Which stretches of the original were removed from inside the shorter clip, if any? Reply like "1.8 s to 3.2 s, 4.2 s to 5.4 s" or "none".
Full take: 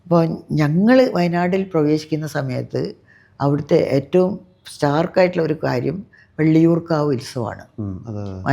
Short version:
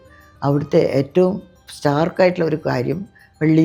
none